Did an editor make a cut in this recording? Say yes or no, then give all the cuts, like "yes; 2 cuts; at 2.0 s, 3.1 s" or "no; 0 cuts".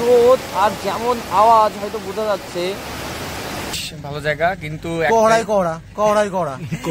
yes; 1 cut; at 3.7 s